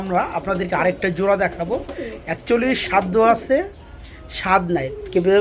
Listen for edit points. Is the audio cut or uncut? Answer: uncut